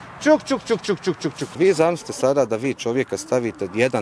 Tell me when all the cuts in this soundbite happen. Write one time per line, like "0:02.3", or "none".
0:01.5